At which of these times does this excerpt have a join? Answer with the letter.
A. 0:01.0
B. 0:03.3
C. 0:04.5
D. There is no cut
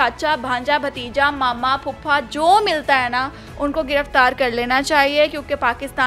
D